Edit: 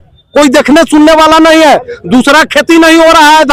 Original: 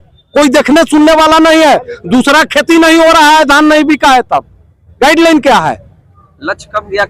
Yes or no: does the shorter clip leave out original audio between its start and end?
no